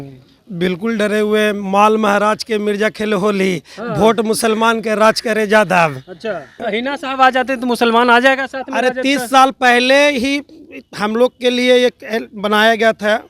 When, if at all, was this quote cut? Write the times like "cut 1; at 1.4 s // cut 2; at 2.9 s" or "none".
cut 1; at 6.6 s